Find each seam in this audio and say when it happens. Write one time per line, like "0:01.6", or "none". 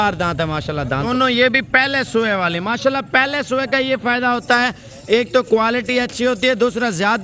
0:01.0